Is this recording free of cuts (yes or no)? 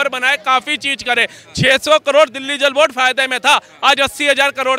yes